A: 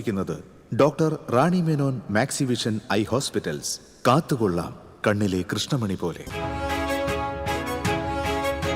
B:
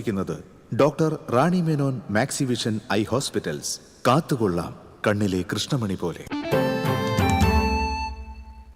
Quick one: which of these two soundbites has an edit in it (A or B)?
A